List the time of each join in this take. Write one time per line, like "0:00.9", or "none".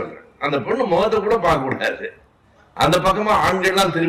none

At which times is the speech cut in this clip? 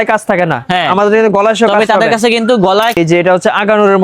0:03.0

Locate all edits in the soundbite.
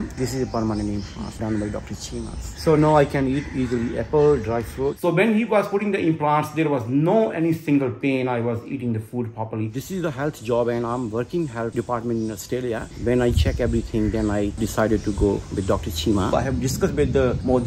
0:02.5
0:05.0
0:09.8
0:12.9
0:16.3

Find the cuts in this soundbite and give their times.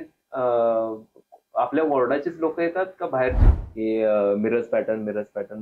0:03.4

